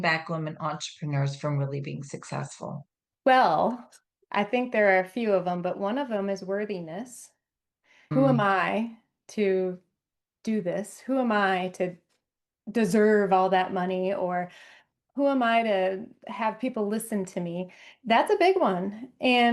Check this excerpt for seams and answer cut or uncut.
uncut